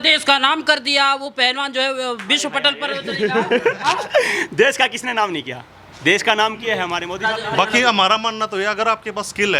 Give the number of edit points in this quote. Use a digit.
1